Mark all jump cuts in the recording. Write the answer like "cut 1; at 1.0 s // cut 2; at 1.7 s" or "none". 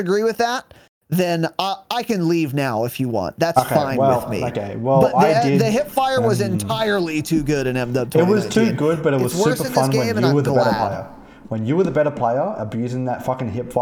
none

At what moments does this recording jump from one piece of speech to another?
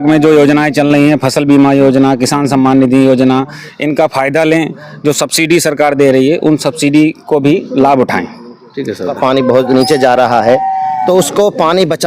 cut 1; at 9.1 s

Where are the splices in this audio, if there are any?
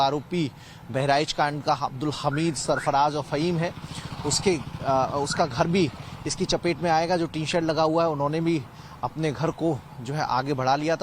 cut 1; at 7.4 s

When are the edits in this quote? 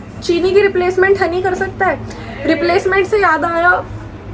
none

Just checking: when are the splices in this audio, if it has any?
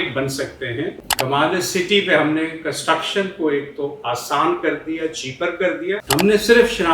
cut 1; at 1.1 s // cut 2; at 6.0 s

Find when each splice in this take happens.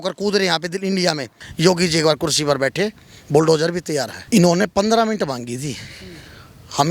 cut 1; at 1.4 s // cut 2; at 4.1 s

